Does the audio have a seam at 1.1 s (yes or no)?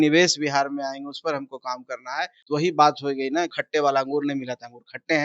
no